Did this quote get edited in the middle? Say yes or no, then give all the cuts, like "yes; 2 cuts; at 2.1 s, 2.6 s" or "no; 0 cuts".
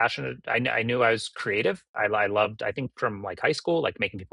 yes; 1 cut; at 1.9 s